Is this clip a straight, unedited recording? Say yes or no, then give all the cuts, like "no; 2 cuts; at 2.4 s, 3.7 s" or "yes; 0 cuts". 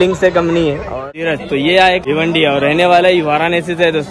no; 2 cuts; at 1.1 s, 2.0 s